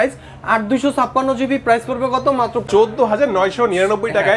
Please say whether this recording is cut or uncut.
cut